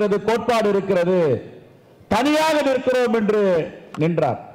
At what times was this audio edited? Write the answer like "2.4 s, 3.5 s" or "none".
none